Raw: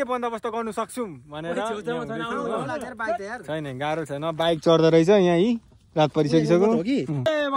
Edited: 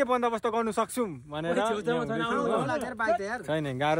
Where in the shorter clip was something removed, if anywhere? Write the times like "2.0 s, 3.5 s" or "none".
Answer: none